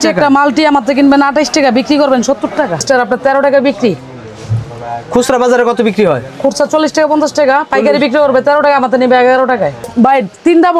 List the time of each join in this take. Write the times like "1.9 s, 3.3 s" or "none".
2.8 s, 9.8 s